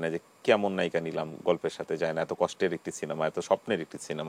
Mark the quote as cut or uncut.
uncut